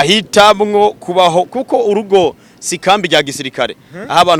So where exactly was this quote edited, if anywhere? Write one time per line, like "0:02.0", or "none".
none